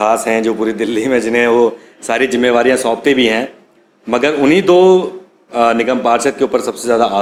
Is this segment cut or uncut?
uncut